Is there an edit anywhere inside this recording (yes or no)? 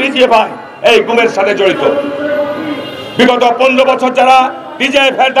no